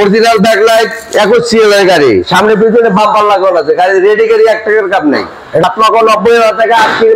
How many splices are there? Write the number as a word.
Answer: one